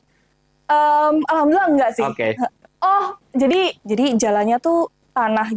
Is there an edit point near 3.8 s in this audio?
yes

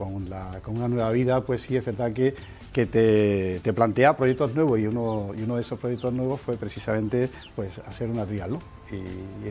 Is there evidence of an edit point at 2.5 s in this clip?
yes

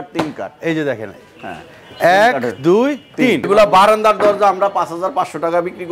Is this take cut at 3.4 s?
yes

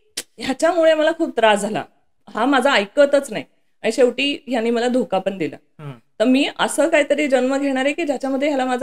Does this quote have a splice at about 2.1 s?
no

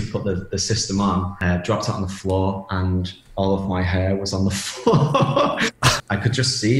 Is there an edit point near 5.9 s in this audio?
yes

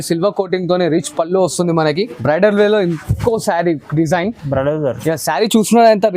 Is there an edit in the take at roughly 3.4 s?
no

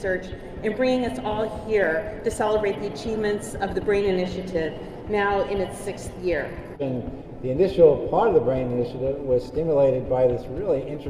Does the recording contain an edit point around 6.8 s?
yes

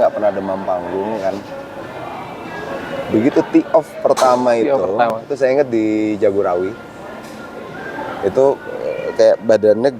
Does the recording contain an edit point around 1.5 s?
no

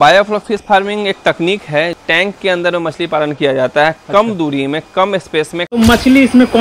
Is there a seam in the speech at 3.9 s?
no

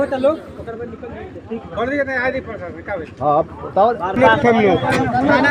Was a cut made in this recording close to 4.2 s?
yes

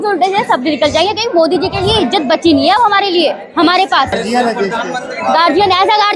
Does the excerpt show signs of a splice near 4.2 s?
yes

